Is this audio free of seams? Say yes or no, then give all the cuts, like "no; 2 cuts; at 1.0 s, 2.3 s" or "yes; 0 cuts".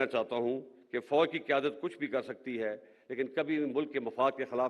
yes; 0 cuts